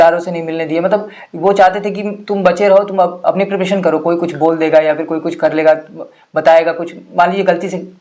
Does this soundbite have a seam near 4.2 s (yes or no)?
no